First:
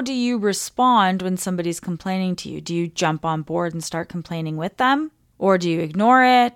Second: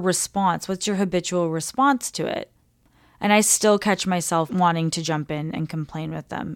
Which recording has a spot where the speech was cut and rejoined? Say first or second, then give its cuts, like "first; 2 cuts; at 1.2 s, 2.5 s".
second; 1 cut; at 4.5 s